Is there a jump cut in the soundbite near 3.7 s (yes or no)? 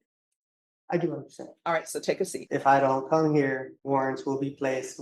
yes